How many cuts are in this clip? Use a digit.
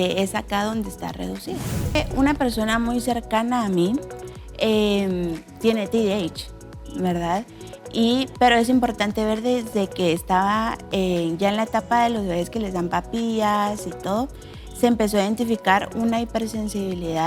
1